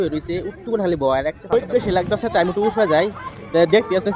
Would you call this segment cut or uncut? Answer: cut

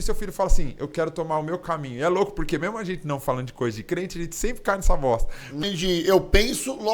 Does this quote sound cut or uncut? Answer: cut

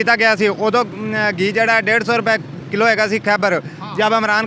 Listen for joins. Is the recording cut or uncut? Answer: uncut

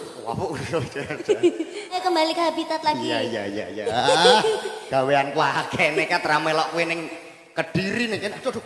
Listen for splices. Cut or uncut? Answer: cut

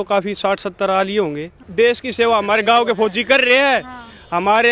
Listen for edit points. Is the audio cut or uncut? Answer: cut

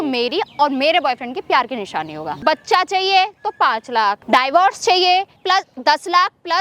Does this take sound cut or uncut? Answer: cut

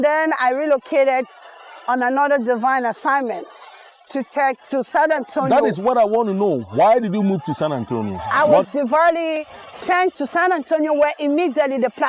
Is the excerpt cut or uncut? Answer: cut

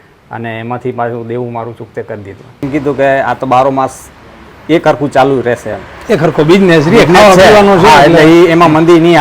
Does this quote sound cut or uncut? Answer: cut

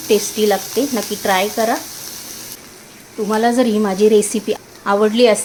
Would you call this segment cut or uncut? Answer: uncut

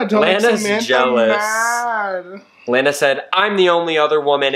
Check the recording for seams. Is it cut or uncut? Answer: uncut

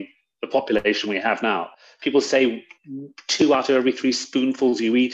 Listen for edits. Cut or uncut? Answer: uncut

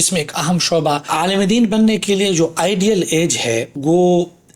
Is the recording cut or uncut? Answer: cut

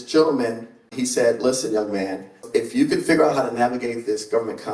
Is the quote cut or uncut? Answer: cut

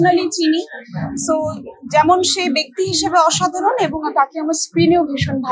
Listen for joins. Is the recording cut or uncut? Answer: uncut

